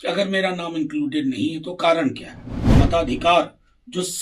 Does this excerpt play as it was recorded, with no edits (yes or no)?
no